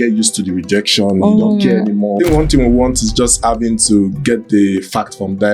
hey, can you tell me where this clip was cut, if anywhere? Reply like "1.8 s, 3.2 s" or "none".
2.2 s